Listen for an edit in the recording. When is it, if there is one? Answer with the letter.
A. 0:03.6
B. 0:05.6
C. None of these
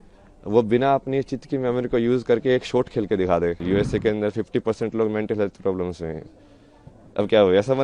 A